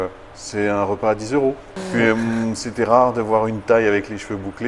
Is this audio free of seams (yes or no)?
no